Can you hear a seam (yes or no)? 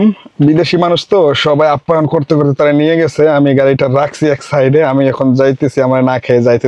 no